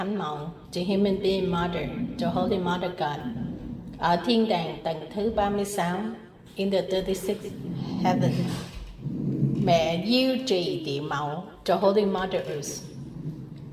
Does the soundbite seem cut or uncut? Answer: uncut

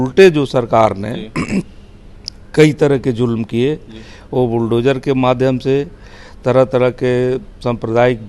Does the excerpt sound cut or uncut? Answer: uncut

